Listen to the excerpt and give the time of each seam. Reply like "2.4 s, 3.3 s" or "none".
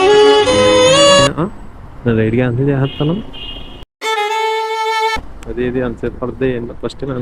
1.3 s